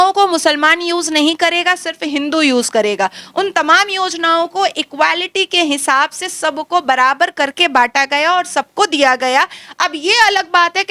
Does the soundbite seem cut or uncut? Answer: uncut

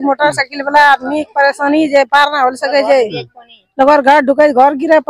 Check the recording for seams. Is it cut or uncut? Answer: uncut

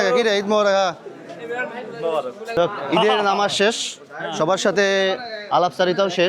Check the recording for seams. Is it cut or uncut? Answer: cut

